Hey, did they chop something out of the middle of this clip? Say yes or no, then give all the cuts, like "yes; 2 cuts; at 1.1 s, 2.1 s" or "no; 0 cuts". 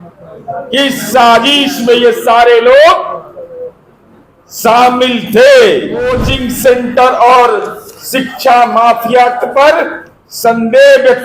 yes; 1 cut; at 6.3 s